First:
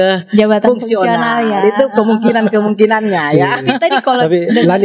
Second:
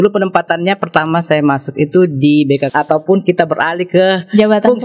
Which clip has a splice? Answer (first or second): second